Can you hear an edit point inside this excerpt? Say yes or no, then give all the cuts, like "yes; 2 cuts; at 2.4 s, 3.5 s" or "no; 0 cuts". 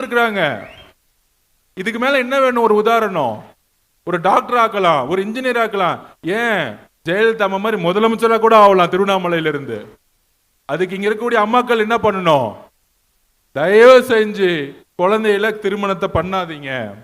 no; 0 cuts